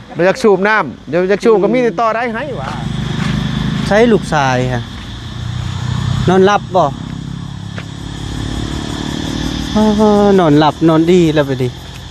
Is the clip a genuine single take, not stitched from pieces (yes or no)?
no